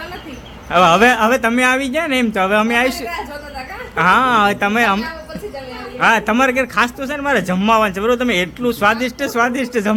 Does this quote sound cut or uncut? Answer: uncut